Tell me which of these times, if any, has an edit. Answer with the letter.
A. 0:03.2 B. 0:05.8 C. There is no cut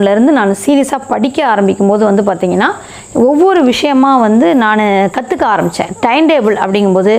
C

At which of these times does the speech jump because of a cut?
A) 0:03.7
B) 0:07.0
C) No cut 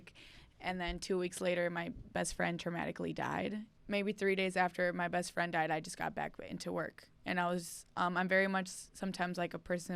A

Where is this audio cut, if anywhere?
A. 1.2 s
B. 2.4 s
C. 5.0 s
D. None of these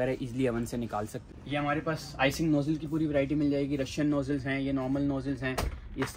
A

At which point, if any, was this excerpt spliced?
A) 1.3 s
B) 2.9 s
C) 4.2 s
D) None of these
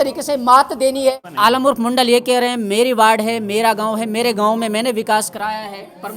A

